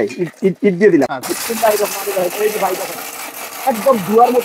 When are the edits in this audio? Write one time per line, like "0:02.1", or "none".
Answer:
0:01.1